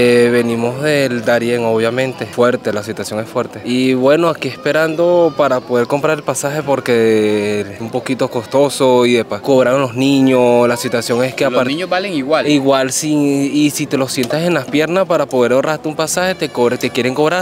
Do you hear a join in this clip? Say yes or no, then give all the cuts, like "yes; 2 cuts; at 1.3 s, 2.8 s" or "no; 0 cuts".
no; 0 cuts